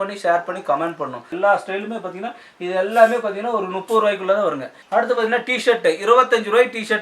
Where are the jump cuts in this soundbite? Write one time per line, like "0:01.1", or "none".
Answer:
0:01.3
0:04.7